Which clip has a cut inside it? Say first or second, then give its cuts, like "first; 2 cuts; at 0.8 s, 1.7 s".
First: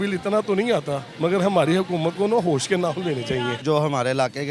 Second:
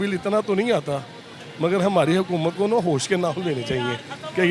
first; 2 cuts; at 1.0 s, 3.6 s